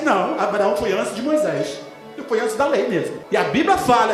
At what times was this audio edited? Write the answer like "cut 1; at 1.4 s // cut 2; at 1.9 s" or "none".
cut 1; at 3.2 s

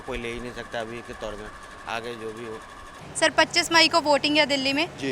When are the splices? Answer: none

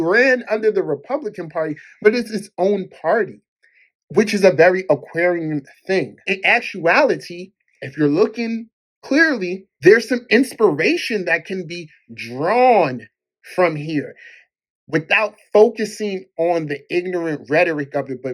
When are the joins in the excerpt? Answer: cut 1; at 6.2 s

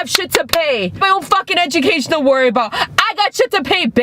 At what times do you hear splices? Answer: cut 1; at 1.0 s

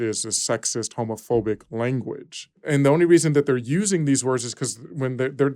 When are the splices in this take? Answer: cut 1; at 2.6 s

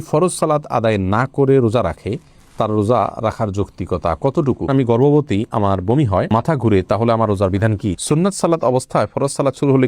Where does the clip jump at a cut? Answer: cut 1; at 4.6 s // cut 2; at 8.0 s

